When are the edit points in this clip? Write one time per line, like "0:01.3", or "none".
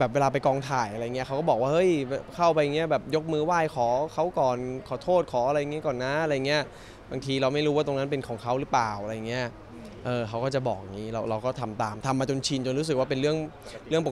none